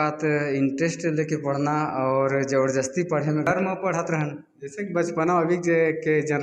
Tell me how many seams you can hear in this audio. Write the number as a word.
one